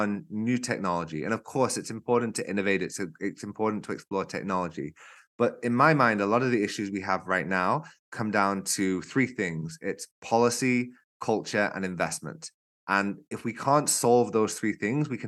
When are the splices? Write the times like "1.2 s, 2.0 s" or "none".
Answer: none